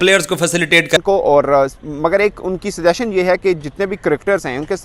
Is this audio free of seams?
no; 1 cut; at 1.0 s

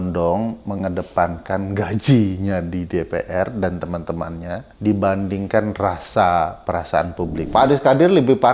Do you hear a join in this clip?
yes; 2 cuts; at 4.7 s, 7.4 s

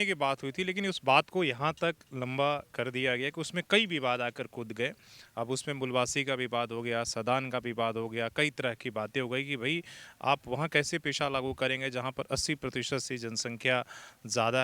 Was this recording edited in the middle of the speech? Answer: no; 0 cuts

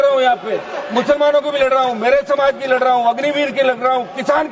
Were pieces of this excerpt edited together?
no; 0 cuts

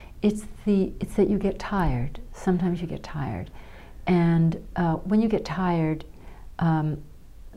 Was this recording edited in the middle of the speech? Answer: no; 0 cuts

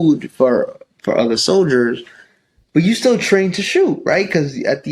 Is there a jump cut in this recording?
no; 0 cuts

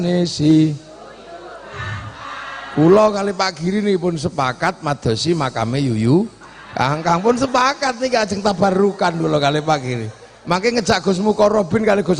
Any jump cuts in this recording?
no; 0 cuts

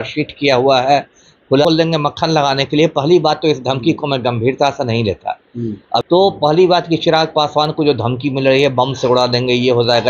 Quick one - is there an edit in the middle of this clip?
yes; 2 cuts; at 1.6 s, 6.0 s

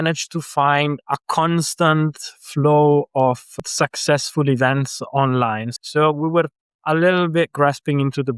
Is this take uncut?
no; 3 cuts; at 1.0 s, 3.5 s, 5.7 s

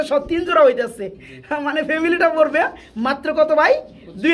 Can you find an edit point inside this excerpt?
no; 0 cuts

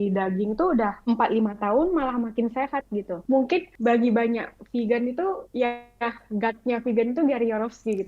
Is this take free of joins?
no; 1 cut; at 3.1 s

